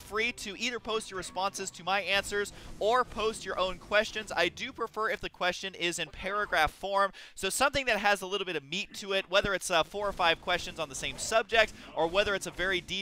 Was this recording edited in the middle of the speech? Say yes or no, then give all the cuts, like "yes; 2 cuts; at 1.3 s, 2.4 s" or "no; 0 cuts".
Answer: yes; 1 cut; at 6.1 s